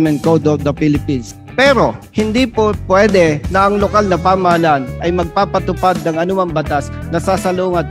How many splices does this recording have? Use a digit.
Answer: 3